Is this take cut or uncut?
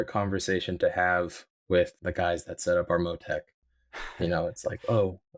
uncut